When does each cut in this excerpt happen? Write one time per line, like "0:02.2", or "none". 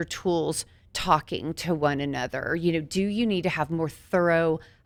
none